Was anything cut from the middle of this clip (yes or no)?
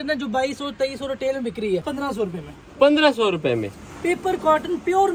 yes